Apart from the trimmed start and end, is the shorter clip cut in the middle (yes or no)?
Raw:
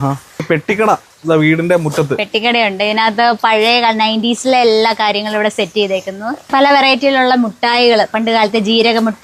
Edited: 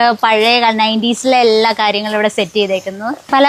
no